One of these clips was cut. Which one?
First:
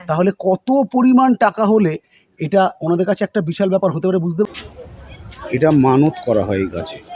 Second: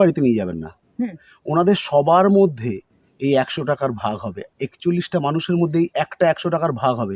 first; 1 cut; at 4.5 s

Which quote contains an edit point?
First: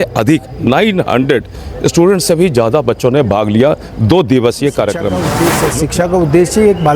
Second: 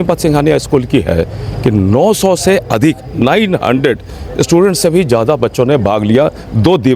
first; 1 cut; at 5.4 s

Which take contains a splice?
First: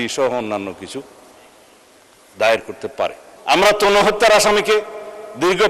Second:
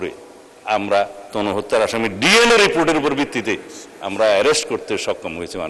first; 1 cut; at 3.3 s

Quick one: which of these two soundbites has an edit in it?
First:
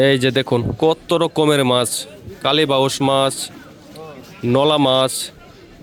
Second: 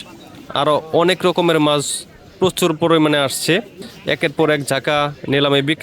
second; 1 cut; at 3.8 s

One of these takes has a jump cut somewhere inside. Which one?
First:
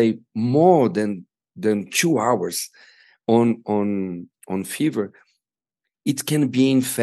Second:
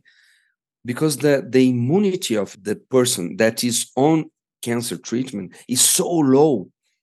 second; 2 cuts; at 2.5 s, 4.4 s

